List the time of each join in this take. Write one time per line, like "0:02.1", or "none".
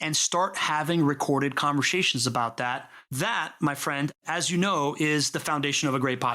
0:03.1